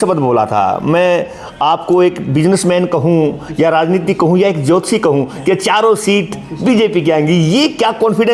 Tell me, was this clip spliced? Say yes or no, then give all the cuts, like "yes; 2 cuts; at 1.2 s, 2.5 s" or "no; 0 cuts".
no; 0 cuts